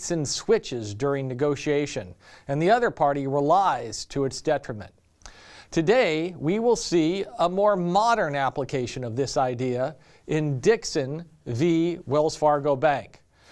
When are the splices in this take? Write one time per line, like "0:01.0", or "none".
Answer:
0:01.2